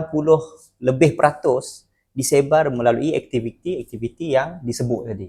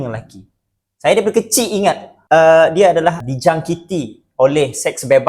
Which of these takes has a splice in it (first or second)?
second